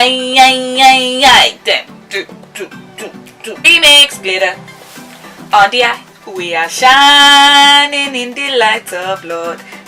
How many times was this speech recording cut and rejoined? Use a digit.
1